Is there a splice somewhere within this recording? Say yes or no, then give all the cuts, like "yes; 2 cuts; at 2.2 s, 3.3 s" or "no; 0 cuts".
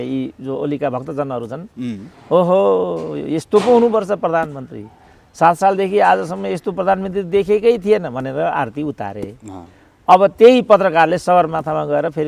no; 0 cuts